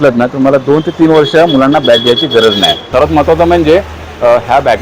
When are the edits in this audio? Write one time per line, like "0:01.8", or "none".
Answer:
0:02.8